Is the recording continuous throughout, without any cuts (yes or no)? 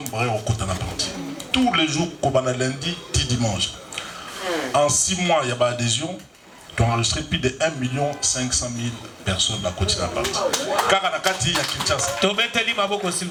yes